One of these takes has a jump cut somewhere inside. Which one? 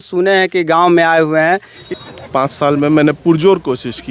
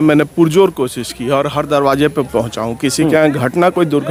first; 1 cut; at 1.8 s

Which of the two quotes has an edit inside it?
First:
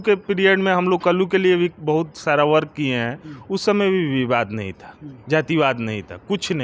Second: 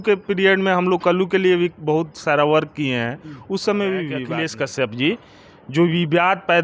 second; 1 cut; at 4.3 s

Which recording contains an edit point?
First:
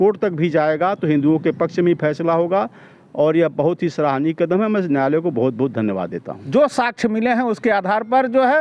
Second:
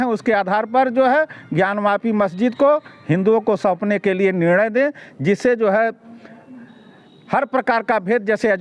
first; 1 cut; at 6.3 s

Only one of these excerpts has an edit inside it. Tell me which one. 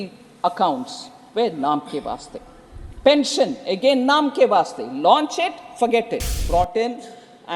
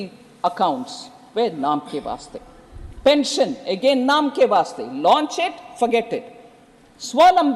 first; 1 cut; at 6.4 s

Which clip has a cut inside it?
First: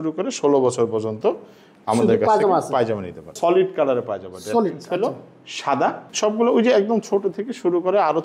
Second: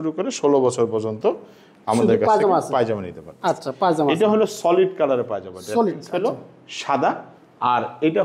first; 2 cuts; at 3.3 s, 6.1 s

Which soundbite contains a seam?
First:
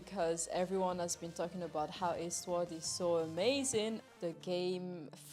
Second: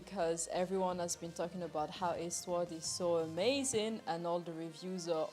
first; 1 cut; at 4.0 s

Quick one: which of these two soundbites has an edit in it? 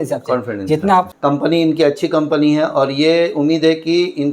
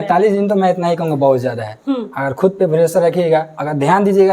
first; 1 cut; at 1.1 s

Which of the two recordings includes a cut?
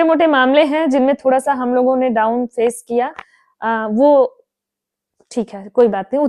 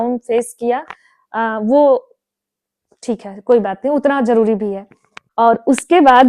second; 1 cut; at 5.2 s

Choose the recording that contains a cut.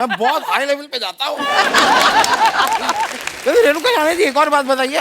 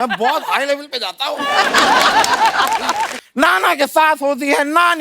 second; 1 cut; at 3.2 s

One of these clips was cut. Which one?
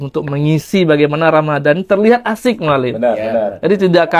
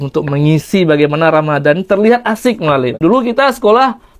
second; 1 cut; at 2.9 s

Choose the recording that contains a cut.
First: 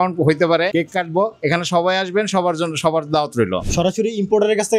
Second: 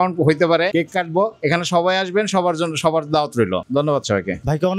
first; 1 cut; at 3.6 s

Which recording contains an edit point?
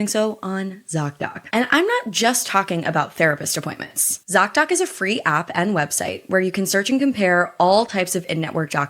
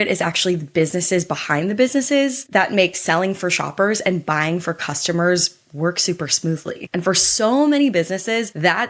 first; 1 cut; at 1.4 s

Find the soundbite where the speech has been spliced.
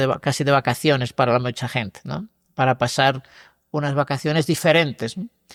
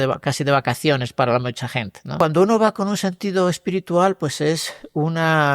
second; 1 cut; at 2.1 s

